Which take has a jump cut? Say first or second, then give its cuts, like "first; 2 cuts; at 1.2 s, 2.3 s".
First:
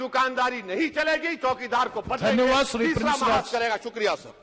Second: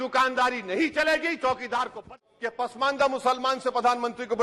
second; 1 cut; at 2.1 s